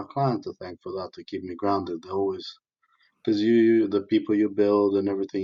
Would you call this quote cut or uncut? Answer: uncut